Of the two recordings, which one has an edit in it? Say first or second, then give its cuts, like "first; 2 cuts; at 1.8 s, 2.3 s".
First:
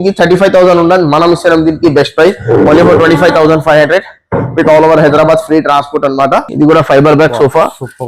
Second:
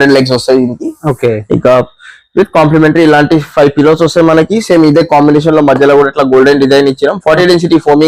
first; 1 cut; at 6.5 s